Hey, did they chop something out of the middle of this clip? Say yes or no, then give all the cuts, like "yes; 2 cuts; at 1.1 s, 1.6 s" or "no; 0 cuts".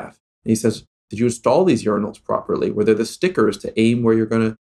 no; 0 cuts